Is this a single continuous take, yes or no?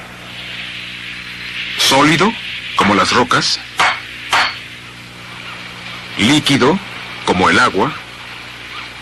no